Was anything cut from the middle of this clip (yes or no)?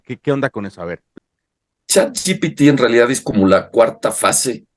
yes